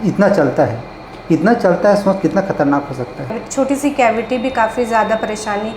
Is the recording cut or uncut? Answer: cut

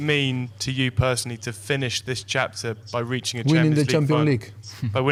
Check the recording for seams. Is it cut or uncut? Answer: uncut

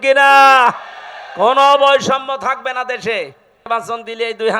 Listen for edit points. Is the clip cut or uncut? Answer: cut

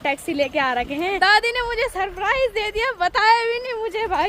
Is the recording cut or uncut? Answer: cut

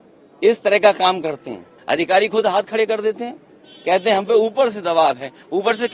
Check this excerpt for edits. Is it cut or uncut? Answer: cut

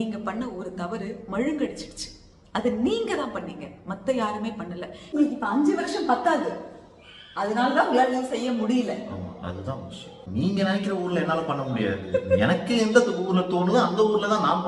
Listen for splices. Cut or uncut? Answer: cut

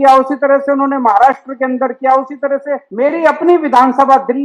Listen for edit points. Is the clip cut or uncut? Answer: cut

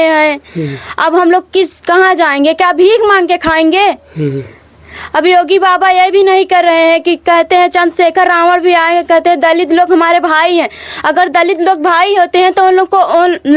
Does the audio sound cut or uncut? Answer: uncut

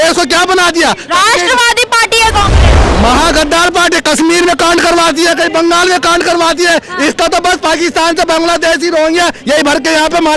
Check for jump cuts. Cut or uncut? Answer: cut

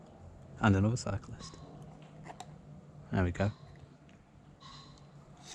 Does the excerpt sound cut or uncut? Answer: uncut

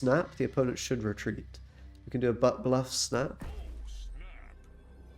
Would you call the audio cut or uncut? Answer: uncut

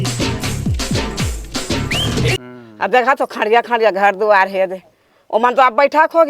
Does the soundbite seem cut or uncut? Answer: cut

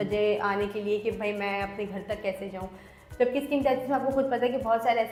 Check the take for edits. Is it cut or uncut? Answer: uncut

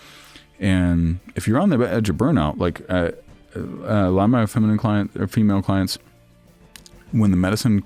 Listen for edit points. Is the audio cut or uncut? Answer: uncut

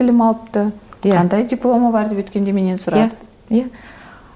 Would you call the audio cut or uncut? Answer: uncut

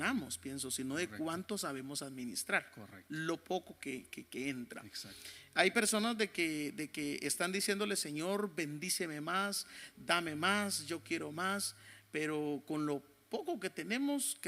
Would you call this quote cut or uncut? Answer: uncut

